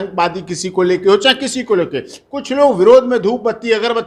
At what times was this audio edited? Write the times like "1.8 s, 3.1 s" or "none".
none